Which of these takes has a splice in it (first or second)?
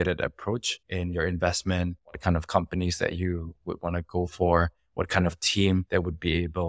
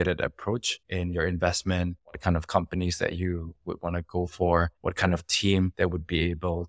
second